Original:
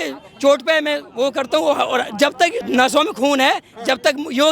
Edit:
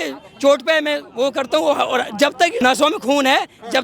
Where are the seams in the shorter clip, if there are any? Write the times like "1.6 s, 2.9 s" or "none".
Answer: 2.6 s